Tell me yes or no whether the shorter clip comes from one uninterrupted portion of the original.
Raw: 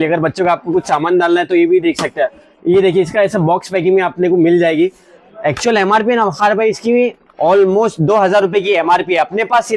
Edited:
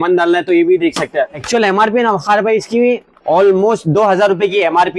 no